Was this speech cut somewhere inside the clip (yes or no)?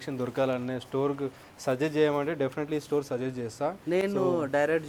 no